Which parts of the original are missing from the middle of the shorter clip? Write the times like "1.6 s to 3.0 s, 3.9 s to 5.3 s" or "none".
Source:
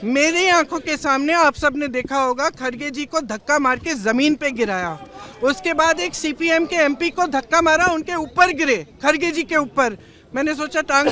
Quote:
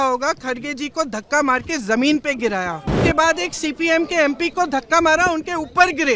5.2 s to 5.6 s